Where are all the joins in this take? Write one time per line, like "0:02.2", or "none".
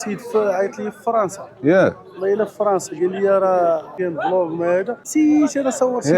0:03.9
0:05.0